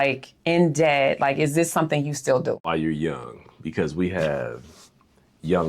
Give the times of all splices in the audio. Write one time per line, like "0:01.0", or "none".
0:02.7